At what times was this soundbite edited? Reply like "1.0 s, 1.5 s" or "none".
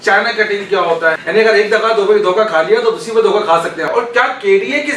1.2 s, 3.9 s

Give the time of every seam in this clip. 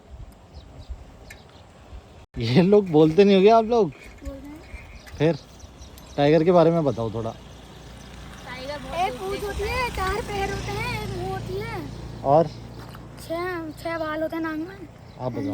none

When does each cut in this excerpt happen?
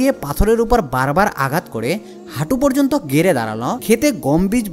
3.8 s

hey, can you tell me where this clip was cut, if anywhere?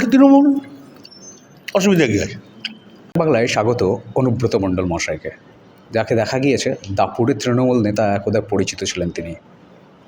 2.9 s

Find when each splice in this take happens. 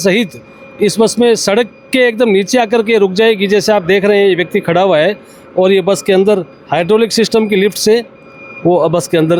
none

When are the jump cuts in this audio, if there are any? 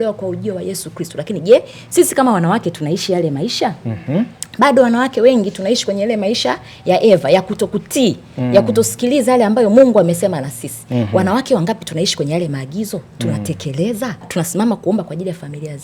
14.3 s

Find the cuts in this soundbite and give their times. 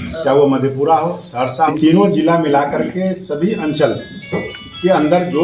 1.7 s

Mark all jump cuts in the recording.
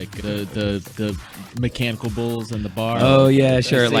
none

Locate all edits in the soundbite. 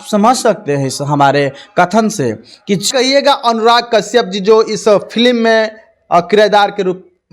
2.9 s

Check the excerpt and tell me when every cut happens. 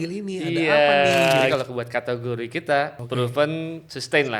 1.5 s, 3.0 s

